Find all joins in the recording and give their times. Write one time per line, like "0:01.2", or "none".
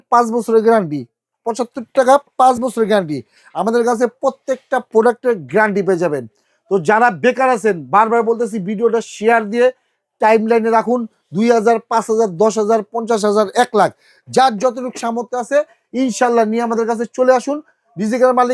none